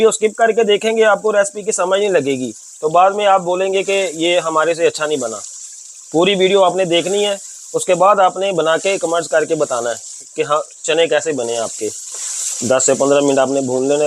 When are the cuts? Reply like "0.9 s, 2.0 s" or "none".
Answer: none